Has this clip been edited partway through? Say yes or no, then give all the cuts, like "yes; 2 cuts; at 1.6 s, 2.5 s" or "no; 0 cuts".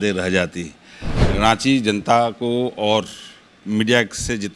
yes; 1 cut; at 1.2 s